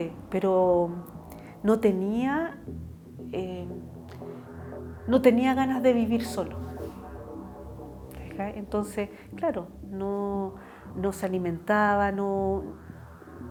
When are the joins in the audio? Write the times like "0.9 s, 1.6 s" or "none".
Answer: none